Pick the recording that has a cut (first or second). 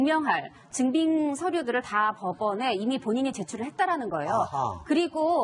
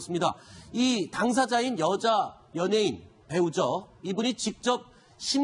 first